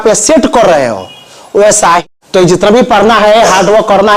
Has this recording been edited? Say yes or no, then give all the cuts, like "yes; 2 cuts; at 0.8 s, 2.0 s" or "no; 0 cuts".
yes; 1 cut; at 2.0 s